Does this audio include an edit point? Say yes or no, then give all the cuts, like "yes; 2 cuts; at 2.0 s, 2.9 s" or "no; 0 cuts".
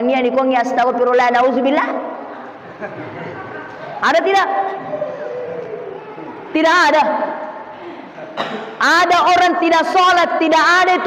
no; 0 cuts